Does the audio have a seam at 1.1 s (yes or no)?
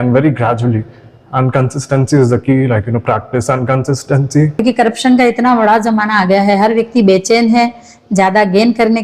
no